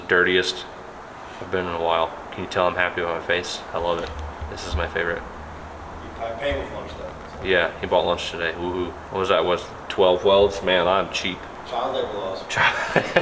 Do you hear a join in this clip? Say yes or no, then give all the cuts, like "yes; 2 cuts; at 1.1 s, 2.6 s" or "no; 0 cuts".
yes; 3 cuts; at 2.3 s, 9.0 s, 11.6 s